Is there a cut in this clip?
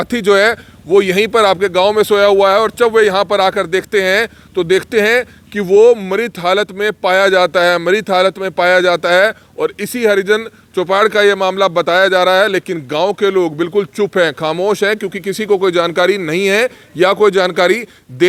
no; 0 cuts

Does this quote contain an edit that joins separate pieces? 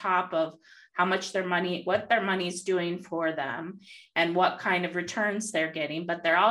no; 0 cuts

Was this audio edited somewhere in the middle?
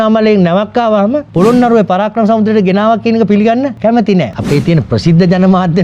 yes; 2 cuts; at 1.3 s, 4.2 s

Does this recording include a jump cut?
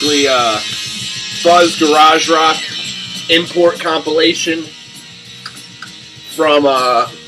no; 0 cuts

